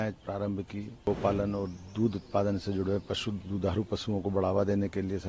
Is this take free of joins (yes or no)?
no